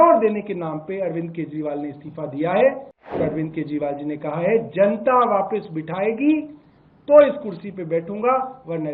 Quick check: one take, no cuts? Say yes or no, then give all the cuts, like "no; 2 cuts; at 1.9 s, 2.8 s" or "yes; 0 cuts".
no; 1 cut; at 3.2 s